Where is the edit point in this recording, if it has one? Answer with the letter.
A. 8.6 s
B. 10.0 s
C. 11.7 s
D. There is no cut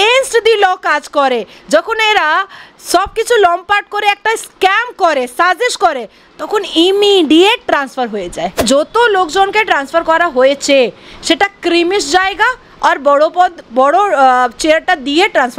A